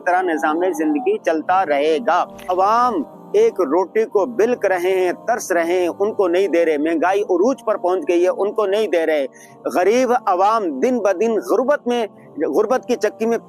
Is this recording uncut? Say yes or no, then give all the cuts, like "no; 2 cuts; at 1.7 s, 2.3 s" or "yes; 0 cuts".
no; 1 cut; at 2.5 s